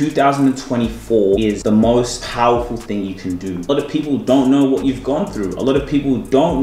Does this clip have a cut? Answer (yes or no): yes